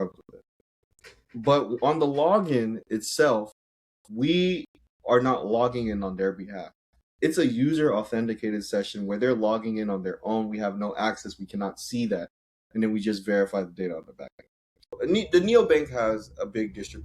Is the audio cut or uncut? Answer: cut